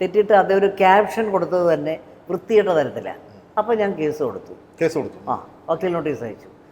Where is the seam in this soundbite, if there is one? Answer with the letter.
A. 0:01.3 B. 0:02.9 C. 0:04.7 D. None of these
D